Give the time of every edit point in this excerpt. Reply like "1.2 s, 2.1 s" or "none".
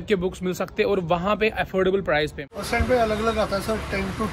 2.5 s